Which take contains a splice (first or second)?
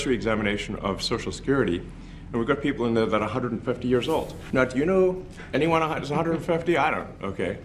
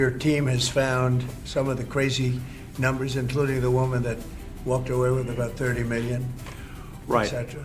first